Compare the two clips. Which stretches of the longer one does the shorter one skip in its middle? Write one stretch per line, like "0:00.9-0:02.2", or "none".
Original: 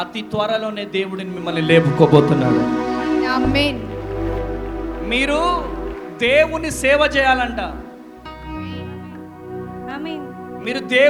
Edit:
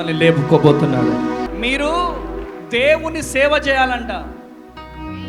0:03.0-0:05.0